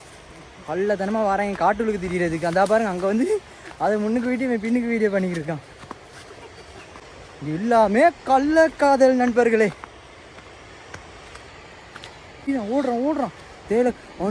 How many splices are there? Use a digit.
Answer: 2